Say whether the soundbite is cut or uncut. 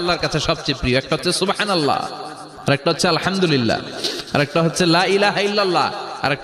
uncut